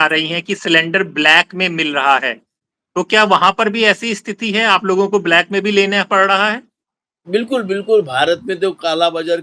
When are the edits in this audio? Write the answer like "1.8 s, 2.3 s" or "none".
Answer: none

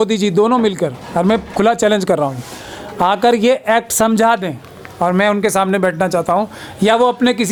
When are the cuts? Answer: none

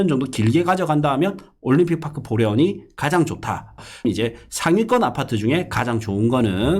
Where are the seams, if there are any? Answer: 4.0 s

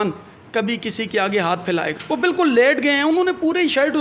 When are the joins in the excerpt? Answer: 2.0 s

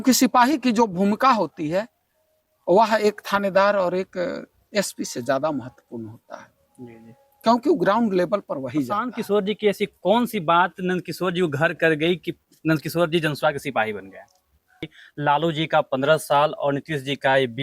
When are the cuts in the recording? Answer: 9.1 s, 15.0 s

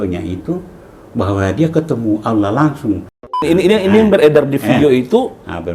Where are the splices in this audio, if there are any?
3.4 s

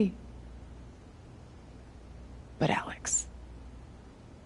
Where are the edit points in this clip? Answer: none

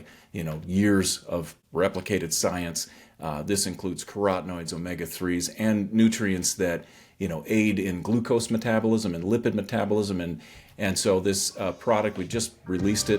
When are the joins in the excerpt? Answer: 1.6 s

